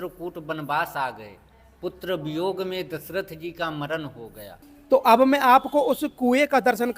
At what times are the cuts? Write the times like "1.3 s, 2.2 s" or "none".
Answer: 4.7 s